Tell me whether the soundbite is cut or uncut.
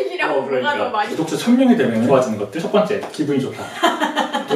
cut